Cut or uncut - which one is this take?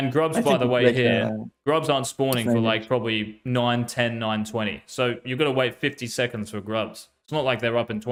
uncut